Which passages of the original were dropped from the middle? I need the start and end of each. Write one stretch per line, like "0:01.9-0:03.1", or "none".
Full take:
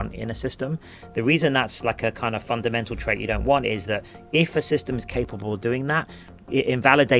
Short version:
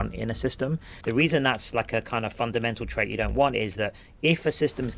0:00.9-0:01.0